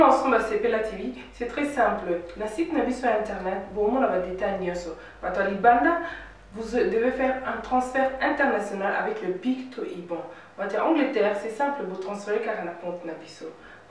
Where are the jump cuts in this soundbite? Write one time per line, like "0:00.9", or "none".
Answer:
none